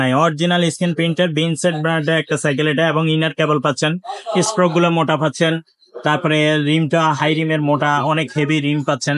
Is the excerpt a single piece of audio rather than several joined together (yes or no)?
yes